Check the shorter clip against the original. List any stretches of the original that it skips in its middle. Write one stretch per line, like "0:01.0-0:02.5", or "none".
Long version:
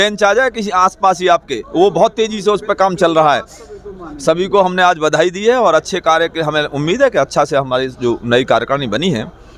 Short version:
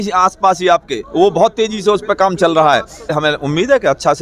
0:03.6-0:06.4